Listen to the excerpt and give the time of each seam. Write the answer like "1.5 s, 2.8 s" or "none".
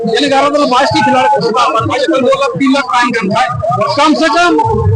none